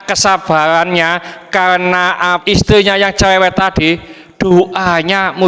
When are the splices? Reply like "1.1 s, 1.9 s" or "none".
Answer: 2.4 s